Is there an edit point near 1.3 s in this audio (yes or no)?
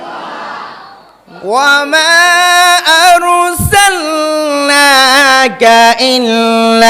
yes